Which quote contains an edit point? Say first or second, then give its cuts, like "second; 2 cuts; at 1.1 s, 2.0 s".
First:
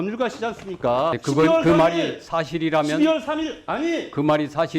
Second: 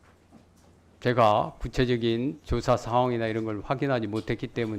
first; 1 cut; at 1.2 s